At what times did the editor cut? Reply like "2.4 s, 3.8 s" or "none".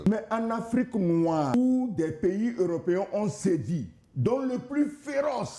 1.5 s